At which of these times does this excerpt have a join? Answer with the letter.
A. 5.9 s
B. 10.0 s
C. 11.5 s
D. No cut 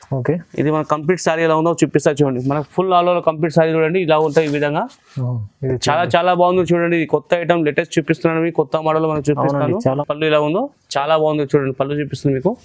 B